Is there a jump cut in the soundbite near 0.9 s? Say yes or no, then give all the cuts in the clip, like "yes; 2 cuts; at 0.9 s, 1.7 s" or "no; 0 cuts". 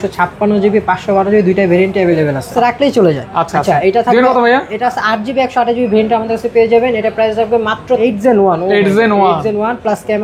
no; 2 cuts; at 2.5 s, 8.0 s